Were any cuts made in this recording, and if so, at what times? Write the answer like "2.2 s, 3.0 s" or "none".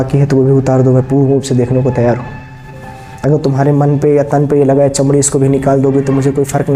none